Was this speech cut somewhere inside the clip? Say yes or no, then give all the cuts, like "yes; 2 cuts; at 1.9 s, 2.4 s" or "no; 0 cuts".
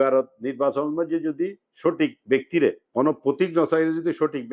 yes; 1 cut; at 2.8 s